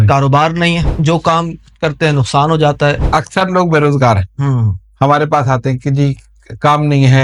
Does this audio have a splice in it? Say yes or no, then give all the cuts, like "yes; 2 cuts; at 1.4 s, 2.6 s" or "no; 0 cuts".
yes; 2 cuts; at 0.9 s, 3.0 s